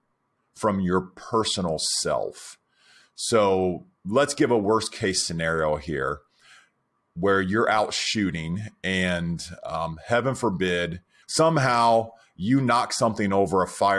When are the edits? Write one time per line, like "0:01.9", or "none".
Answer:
0:11.2